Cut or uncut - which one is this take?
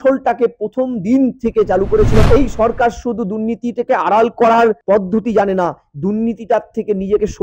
cut